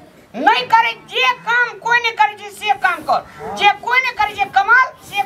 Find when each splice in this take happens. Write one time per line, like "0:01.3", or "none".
none